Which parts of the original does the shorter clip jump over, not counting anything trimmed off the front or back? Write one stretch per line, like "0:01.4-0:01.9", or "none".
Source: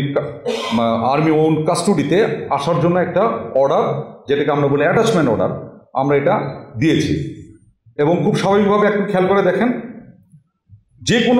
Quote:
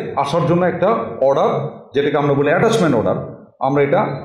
none